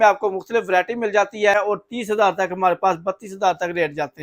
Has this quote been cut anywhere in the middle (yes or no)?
yes